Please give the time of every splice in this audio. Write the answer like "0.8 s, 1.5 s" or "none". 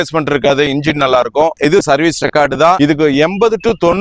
1.6 s, 2.8 s